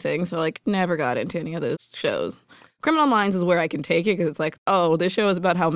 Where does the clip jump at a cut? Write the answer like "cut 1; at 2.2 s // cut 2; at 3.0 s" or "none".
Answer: cut 1; at 1.9 s // cut 2; at 2.7 s // cut 3; at 4.6 s

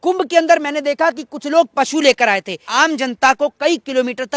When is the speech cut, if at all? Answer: cut 1; at 2.7 s

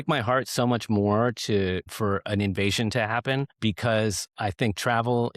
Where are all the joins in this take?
cut 1; at 1.9 s // cut 2; at 3.5 s

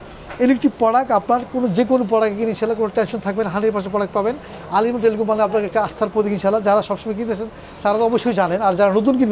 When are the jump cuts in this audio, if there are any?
none

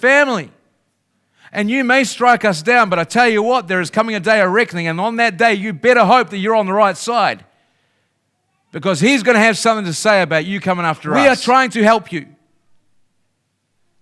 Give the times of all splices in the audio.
cut 1; at 11.0 s

